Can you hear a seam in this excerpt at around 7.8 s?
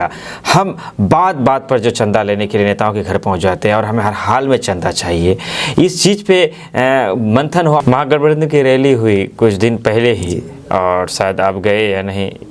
yes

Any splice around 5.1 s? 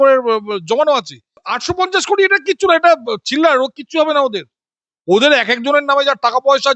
no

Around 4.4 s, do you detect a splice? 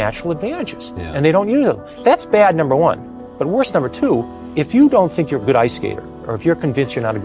yes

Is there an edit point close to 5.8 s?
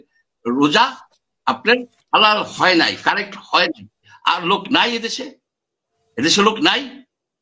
no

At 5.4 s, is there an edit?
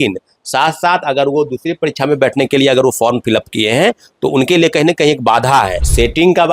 yes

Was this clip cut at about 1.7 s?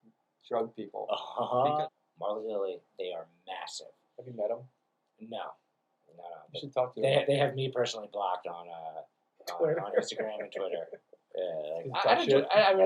yes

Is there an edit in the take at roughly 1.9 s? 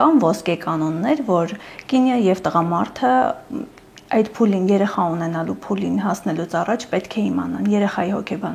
no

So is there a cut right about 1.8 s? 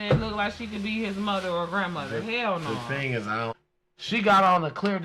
no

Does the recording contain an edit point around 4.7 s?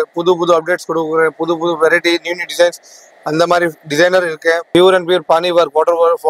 yes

